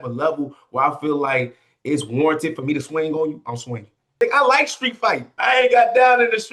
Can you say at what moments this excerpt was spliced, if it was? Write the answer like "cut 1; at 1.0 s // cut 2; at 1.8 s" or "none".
cut 1; at 4.2 s // cut 2; at 5.3 s